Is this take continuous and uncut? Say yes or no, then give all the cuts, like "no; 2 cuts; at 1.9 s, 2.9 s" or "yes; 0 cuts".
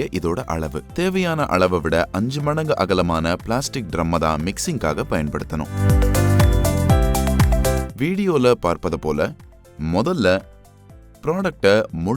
no; 2 cuts; at 5.8 s, 7.9 s